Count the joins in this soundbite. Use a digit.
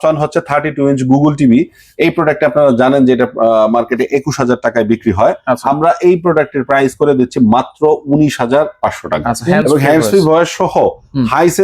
1